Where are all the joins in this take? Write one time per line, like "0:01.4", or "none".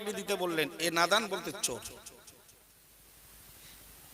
0:02.8

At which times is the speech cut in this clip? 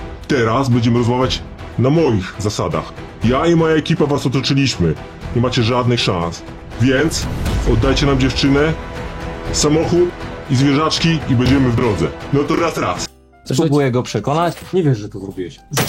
0:14.5

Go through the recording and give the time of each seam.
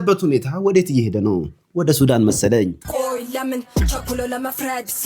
0:02.8

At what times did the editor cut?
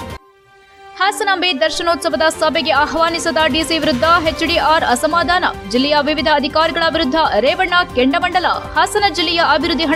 none

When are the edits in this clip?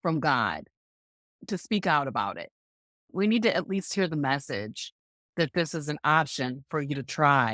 0:01.3
0:03.0

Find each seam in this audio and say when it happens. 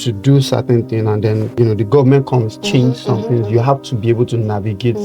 0:01.5

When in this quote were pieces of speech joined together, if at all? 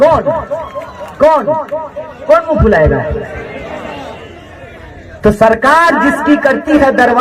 0:05.0

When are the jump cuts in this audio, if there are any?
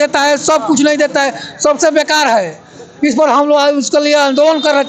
none

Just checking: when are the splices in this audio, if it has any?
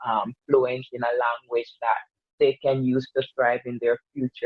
none

